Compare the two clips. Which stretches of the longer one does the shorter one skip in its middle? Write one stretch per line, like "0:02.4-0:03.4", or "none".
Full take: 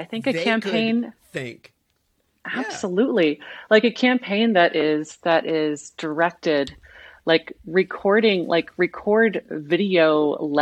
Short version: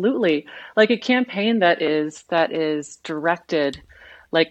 none